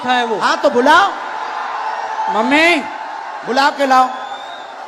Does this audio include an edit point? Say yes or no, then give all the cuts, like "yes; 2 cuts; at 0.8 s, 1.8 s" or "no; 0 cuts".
no; 0 cuts